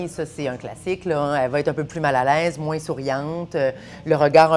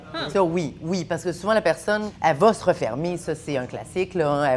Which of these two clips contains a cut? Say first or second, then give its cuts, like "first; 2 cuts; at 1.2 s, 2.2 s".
second; 1 cut; at 2.1 s